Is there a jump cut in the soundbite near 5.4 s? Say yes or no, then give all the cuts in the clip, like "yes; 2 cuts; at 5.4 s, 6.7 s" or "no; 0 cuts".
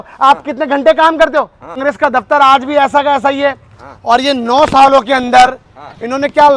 no; 1 cut; at 1.8 s